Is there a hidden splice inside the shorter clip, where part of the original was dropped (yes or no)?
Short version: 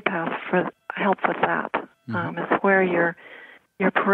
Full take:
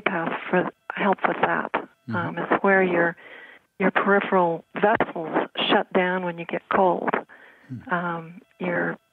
no